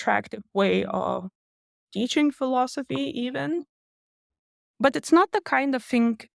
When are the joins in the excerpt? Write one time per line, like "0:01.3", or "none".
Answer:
0:03.8

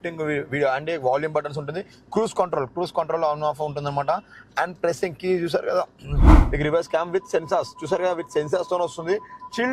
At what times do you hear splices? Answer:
0:06.4

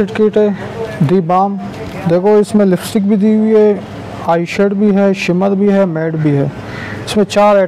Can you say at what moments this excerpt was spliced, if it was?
none

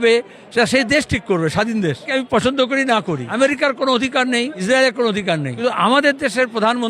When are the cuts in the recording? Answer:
0:02.1
0:03.3
0:04.6
0:05.5

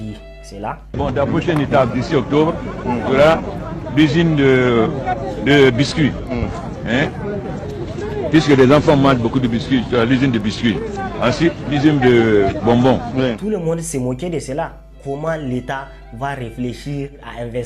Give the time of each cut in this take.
0:13.4
0:15.0

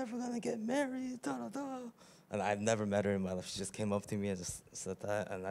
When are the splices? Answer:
none

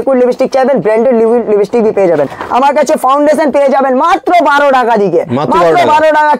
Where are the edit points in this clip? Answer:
0:02.3

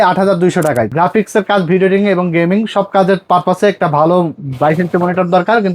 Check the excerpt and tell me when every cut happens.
0:00.9

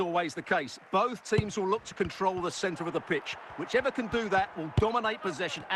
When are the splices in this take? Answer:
none

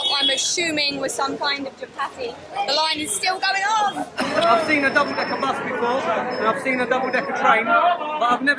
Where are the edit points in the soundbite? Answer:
0:04.2

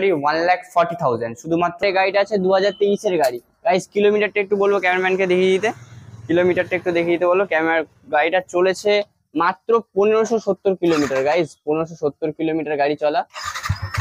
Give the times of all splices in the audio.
0:01.8

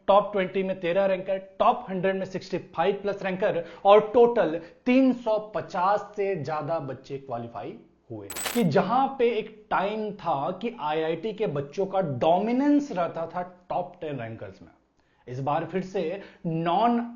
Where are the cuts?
0:08.4

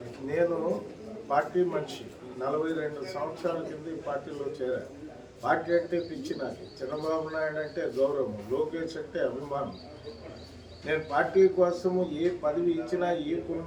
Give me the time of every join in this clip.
none

